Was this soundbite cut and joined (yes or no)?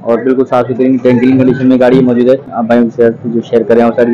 no